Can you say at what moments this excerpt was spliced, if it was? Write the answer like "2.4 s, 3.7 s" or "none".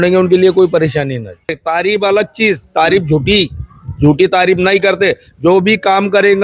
1.5 s